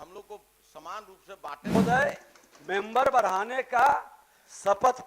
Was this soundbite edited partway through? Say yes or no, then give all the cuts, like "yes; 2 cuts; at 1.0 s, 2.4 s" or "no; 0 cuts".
yes; 1 cut; at 1.8 s